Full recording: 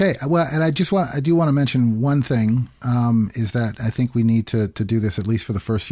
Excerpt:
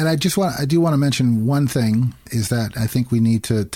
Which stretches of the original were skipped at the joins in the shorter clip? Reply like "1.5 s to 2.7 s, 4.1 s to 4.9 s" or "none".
2.8 s to 3.3 s